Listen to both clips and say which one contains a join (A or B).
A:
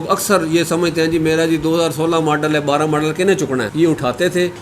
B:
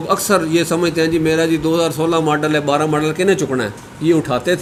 A